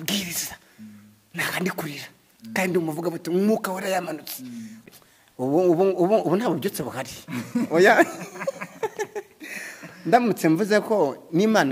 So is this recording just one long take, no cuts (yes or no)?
no